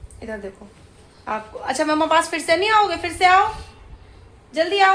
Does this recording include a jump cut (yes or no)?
no